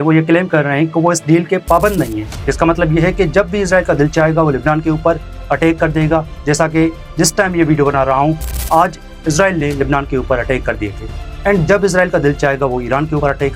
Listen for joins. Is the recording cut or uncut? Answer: uncut